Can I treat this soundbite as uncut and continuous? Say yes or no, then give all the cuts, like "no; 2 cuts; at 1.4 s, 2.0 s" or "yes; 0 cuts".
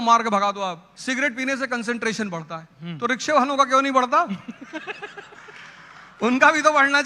no; 1 cut; at 0.9 s